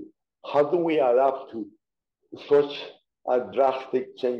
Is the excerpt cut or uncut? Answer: uncut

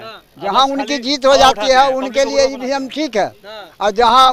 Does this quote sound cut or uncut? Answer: uncut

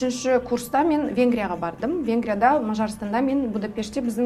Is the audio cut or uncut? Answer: uncut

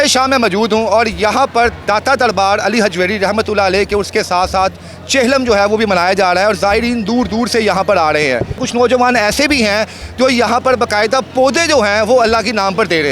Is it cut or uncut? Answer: cut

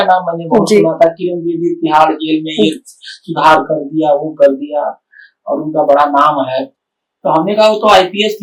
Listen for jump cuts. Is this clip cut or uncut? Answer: uncut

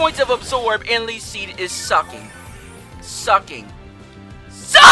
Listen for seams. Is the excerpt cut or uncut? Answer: uncut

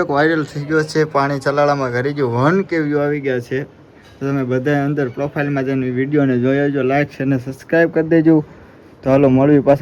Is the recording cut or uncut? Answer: uncut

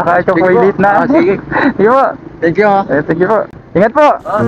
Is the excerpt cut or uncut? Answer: cut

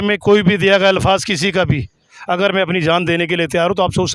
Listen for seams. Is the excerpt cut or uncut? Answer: uncut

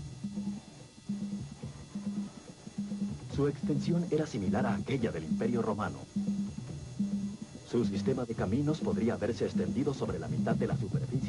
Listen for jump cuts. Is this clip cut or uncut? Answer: uncut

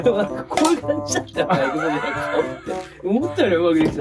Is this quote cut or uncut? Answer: uncut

